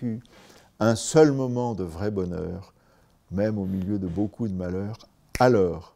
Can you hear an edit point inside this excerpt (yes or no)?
no